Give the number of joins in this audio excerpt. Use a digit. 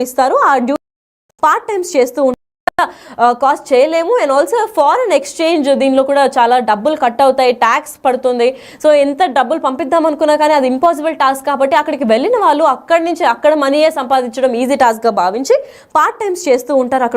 2